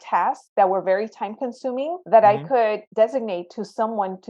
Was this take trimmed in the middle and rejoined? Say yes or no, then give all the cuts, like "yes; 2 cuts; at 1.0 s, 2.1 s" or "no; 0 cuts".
yes; 2 cuts; at 2.0 s, 2.9 s